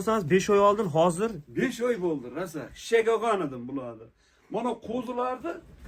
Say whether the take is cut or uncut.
uncut